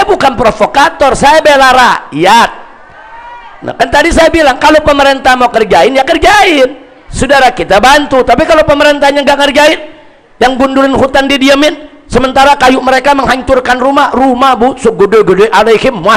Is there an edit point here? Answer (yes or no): no